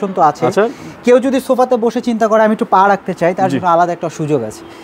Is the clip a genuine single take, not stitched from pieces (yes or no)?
yes